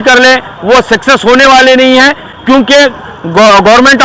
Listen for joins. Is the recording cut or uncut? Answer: uncut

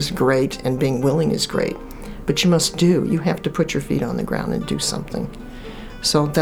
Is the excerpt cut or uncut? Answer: uncut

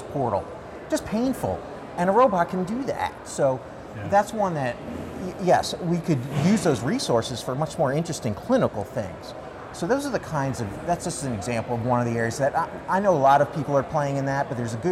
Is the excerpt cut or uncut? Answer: uncut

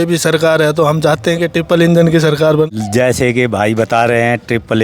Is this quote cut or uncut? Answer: cut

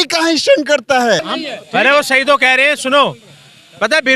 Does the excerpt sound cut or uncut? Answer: cut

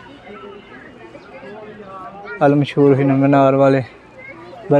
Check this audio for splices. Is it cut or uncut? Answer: uncut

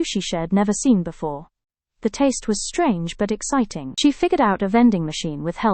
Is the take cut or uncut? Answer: cut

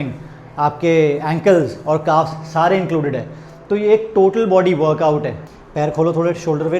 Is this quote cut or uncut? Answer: cut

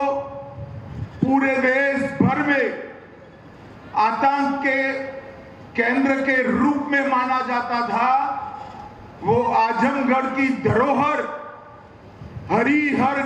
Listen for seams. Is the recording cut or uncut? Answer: uncut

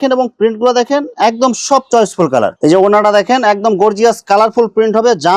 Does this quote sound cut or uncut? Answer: cut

